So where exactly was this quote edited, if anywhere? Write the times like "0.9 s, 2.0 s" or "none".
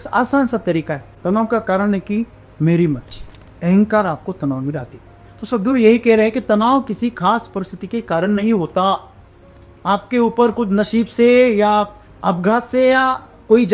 1.0 s, 12.0 s